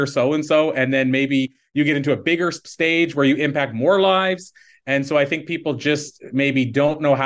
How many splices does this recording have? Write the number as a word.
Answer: one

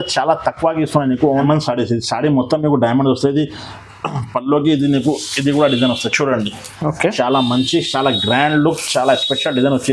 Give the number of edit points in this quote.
one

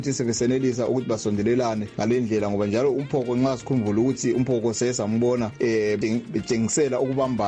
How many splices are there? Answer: one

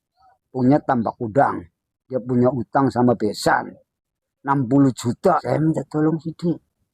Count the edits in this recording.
one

